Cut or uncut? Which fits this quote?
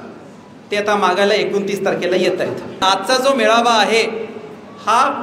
cut